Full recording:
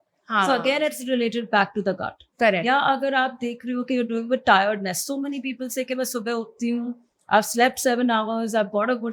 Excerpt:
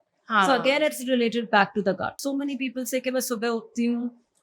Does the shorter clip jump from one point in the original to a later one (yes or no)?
yes